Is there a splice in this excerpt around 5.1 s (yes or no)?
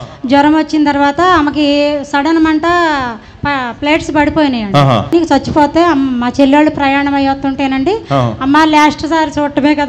yes